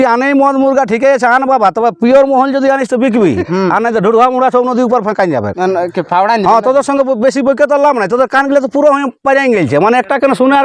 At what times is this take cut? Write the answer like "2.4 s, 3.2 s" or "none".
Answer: none